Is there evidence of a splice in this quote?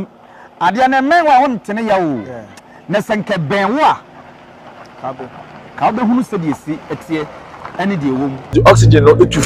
yes; 1 cut; at 8.5 s

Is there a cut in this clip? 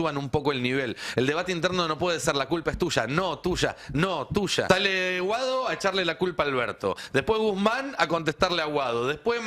yes; 1 cut; at 4.7 s

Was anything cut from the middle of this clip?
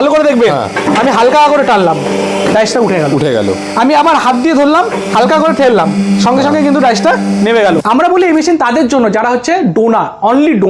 yes; 1 cut; at 7.8 s

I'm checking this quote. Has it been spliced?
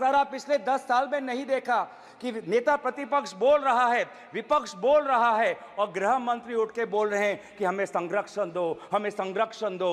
no; 0 cuts

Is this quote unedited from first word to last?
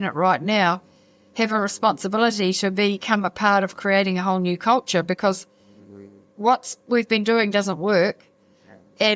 yes; 0 cuts

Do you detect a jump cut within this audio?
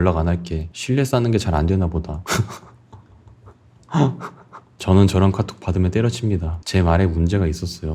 no; 0 cuts

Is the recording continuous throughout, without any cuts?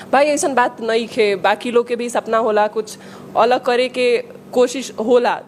yes; 0 cuts

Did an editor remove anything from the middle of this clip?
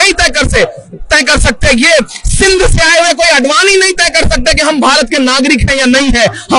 no; 0 cuts

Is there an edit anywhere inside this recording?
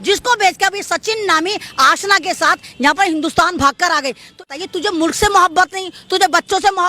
yes; 1 cut; at 4.5 s

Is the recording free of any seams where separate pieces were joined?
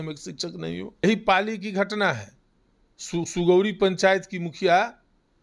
no; 1 cut; at 0.9 s

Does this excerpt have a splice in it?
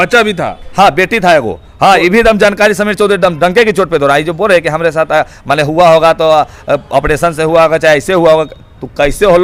no; 0 cuts

